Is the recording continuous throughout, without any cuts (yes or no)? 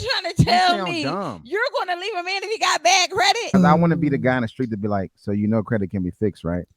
no